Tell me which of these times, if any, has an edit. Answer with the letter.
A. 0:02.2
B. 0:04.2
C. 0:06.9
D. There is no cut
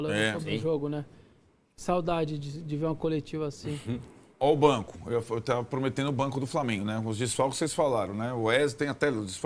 D